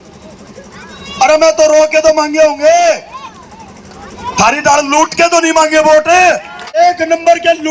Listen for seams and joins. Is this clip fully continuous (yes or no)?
no